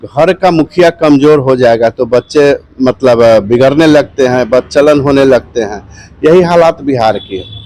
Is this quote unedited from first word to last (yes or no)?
yes